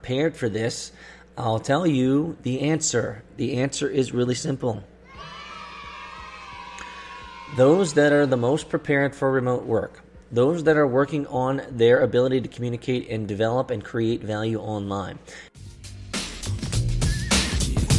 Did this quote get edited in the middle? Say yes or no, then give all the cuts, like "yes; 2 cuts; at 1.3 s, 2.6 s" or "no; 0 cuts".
yes; 1 cut; at 15.6 s